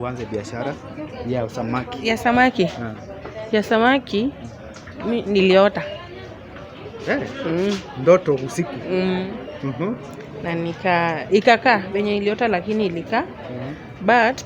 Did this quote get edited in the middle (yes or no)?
no